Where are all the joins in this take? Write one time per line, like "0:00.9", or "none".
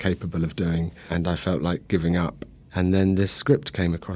0:01.1